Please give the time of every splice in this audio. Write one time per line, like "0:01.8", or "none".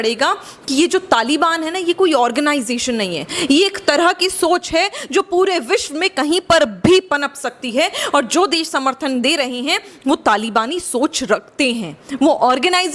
none